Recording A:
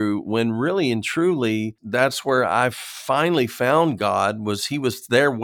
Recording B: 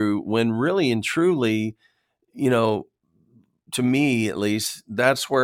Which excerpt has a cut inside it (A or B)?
A